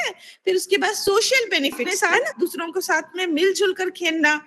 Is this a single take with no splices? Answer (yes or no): no